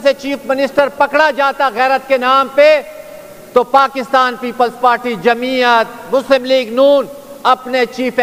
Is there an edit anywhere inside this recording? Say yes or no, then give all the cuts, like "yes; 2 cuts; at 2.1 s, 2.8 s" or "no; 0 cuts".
no; 0 cuts